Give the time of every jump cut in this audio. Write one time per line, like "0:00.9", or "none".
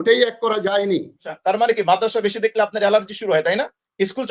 0:01.3